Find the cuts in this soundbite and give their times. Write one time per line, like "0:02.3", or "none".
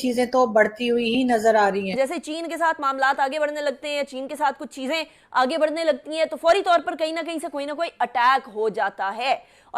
0:01.9